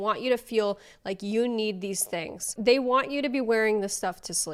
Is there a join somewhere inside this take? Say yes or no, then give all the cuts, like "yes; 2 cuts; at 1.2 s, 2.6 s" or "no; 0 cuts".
no; 0 cuts